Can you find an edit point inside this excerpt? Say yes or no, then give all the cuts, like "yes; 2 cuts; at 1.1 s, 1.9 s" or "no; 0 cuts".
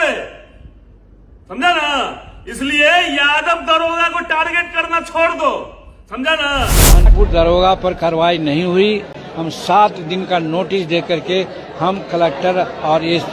yes; 1 cut; at 7.0 s